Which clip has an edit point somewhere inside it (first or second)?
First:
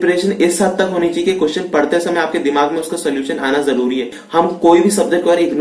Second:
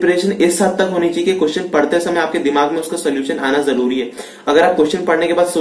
first